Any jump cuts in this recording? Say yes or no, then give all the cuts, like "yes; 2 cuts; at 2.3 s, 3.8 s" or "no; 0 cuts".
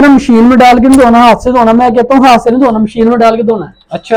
no; 0 cuts